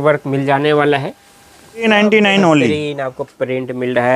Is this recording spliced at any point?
yes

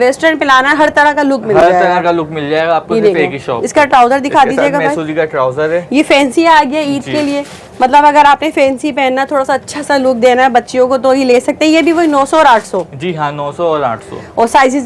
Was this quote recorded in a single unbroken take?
yes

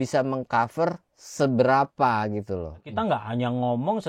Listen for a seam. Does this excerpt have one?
yes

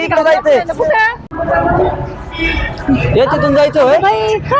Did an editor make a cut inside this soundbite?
yes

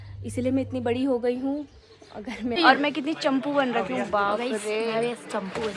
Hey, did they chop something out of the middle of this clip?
yes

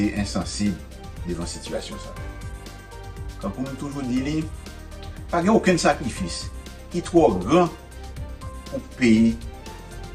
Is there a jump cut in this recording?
no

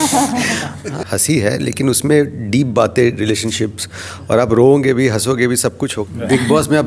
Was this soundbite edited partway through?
yes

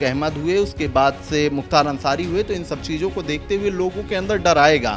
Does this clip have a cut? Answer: no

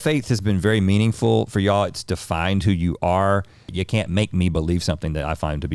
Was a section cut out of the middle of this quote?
yes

